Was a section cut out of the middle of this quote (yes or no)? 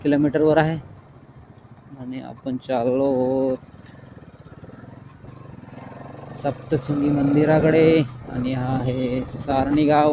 no